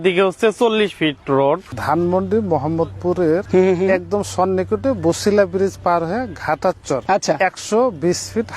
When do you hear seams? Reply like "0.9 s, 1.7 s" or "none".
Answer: 1.7 s, 3.4 s, 7.0 s